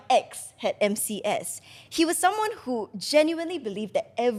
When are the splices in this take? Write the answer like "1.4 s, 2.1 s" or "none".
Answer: none